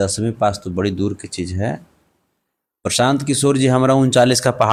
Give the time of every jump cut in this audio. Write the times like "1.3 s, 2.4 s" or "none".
none